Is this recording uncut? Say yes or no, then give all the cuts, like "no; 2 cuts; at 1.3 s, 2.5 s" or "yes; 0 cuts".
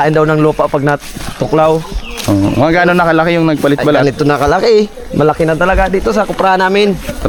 yes; 0 cuts